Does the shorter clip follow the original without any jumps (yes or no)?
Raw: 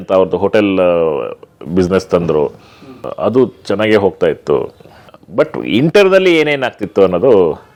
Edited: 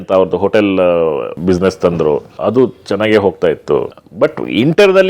no